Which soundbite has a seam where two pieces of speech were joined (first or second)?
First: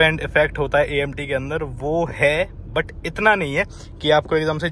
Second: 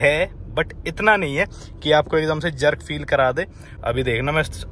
second